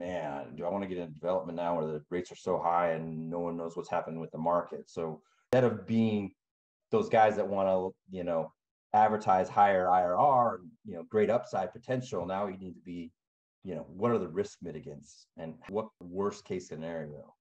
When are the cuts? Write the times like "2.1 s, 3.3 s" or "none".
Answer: 5.4 s, 15.7 s